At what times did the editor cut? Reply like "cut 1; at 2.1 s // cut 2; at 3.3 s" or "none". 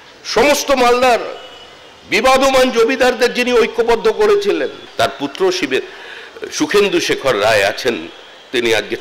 cut 1; at 4.8 s